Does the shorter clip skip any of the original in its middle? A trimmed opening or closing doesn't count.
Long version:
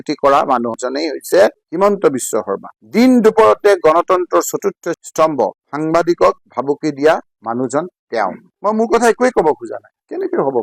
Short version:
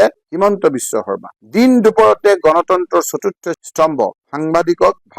no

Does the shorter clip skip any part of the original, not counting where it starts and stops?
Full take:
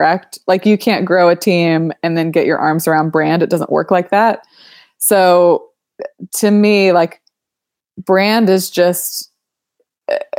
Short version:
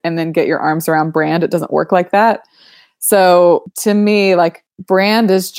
yes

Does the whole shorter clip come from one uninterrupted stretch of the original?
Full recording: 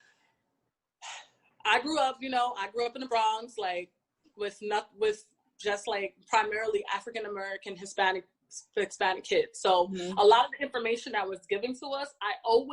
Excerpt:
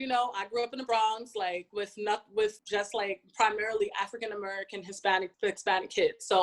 no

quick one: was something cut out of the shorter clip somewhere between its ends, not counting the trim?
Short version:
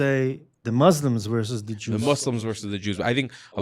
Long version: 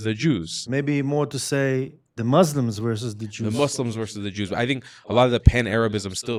no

